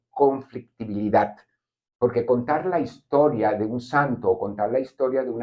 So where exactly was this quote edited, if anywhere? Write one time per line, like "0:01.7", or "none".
none